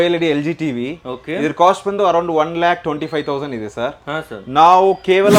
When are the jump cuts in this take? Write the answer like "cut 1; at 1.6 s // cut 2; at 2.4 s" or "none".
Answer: none